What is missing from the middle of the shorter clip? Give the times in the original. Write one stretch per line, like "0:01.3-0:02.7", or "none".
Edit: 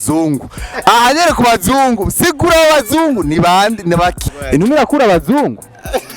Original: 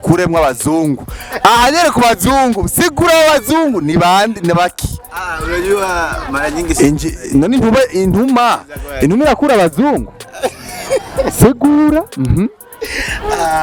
0:04.9-0:08.8